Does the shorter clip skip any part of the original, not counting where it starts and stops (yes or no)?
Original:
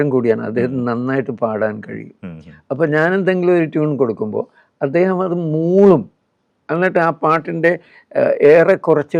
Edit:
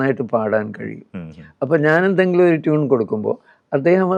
no